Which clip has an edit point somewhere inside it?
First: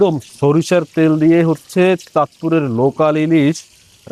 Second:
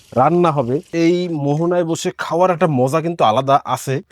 second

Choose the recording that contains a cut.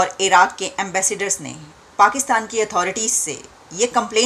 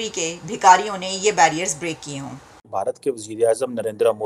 second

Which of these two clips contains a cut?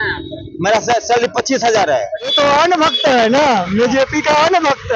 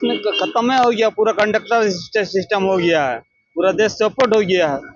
first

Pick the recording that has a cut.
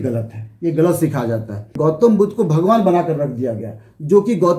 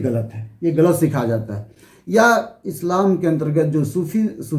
first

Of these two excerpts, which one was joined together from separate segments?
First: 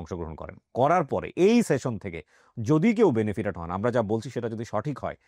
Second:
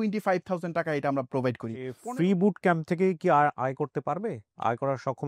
second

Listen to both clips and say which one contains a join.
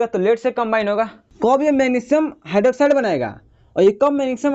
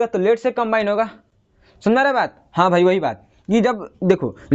first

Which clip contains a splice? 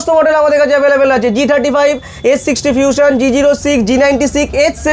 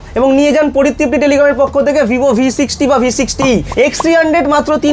second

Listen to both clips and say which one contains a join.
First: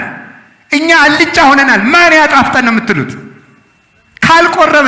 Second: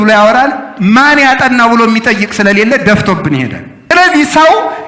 second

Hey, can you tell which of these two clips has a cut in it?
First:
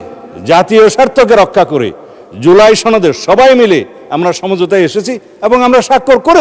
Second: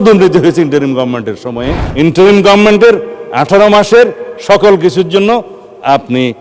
second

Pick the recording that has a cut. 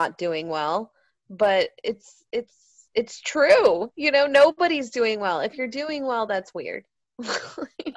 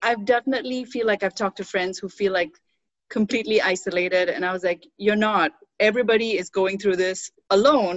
first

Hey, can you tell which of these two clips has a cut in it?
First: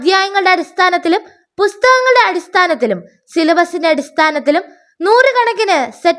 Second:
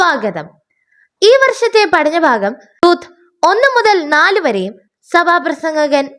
second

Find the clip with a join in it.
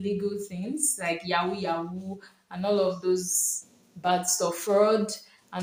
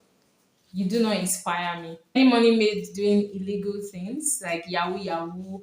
second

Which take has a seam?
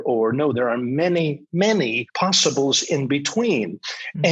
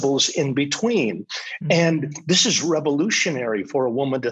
first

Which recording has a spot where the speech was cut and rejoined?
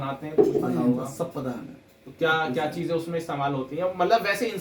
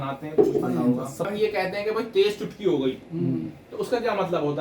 second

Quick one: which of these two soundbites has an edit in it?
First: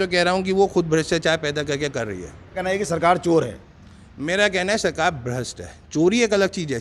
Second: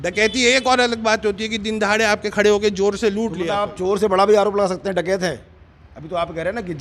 first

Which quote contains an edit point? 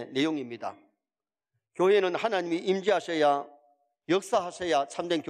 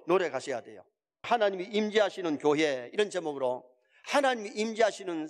first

